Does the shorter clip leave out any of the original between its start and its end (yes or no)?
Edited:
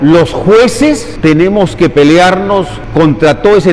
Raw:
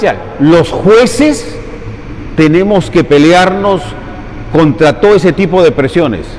yes